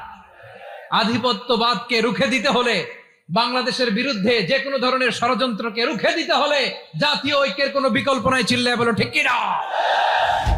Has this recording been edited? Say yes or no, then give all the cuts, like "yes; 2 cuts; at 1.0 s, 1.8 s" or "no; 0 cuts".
no; 0 cuts